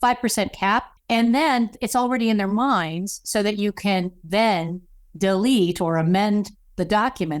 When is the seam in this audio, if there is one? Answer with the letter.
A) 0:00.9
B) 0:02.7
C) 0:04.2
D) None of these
A